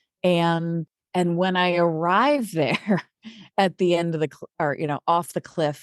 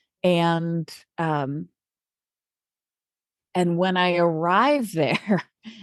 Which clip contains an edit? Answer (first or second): first